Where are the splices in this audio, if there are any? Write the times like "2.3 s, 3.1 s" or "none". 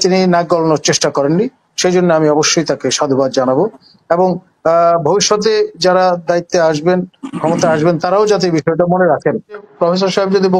9.7 s